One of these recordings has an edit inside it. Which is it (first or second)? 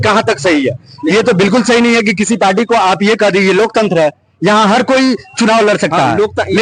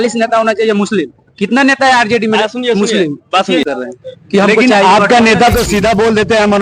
second